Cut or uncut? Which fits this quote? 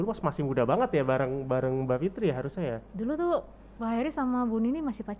uncut